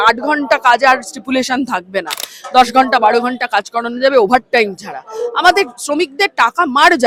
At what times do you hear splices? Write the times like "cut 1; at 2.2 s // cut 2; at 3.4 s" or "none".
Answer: none

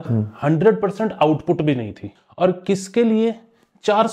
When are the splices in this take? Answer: cut 1; at 2.1 s

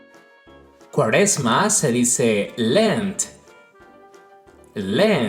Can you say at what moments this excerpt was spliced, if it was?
cut 1; at 0.9 s

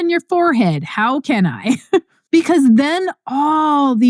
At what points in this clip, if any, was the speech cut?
cut 1; at 2.2 s

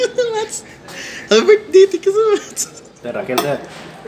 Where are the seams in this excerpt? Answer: cut 1; at 3.1 s

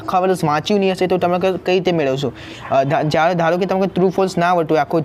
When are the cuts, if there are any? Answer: cut 1; at 2.5 s

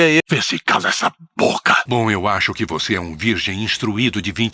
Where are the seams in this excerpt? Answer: cut 1; at 1.8 s

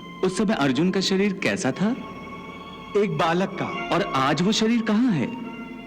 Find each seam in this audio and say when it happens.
cut 1; at 3.8 s

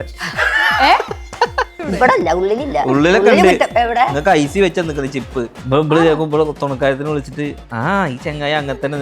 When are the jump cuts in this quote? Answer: cut 1; at 1.8 s // cut 2; at 5.6 s

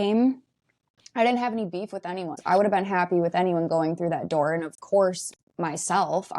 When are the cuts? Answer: cut 1; at 2.4 s

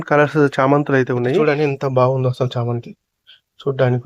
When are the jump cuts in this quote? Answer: cut 1; at 1.4 s

